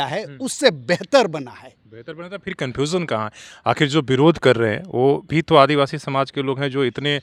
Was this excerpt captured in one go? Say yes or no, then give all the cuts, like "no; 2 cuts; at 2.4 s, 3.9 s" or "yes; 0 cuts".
yes; 0 cuts